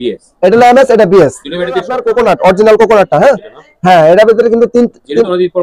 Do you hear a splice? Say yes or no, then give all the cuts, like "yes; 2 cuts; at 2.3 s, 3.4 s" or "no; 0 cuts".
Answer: yes; 1 cut; at 2.0 s